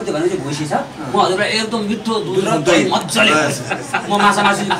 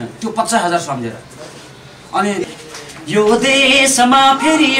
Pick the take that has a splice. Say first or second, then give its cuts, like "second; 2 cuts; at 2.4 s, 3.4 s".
second; 1 cut; at 2.4 s